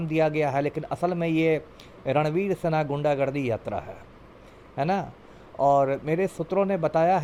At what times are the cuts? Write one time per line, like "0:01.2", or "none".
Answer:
none